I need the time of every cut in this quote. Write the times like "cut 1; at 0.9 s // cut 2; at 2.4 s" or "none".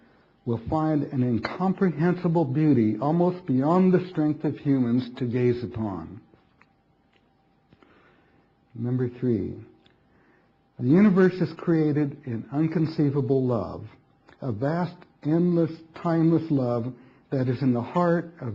cut 1; at 2.9 s

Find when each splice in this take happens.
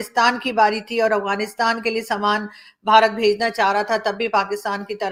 none

